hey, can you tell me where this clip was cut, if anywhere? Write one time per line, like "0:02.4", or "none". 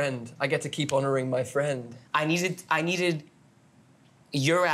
0:01.9